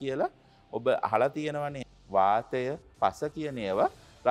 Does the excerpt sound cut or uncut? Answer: cut